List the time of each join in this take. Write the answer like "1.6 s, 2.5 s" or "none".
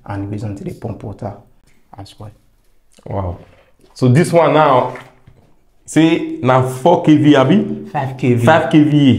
none